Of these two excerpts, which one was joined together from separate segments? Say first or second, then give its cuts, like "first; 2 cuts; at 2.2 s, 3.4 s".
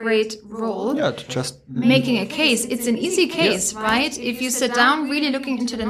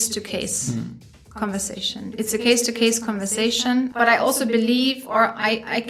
second; 1 cut; at 3.9 s